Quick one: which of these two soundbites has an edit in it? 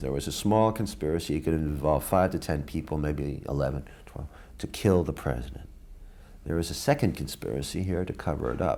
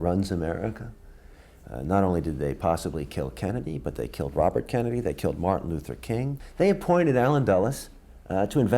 second; 1 cut; at 6.4 s

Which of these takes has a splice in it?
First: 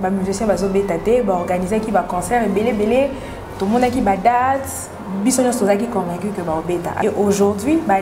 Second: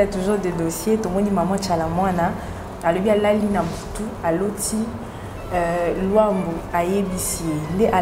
first; 1 cut; at 7.0 s

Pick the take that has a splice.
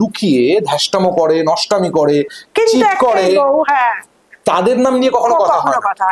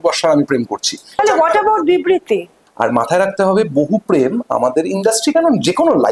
second; 2 cuts; at 1.2 s, 2.6 s

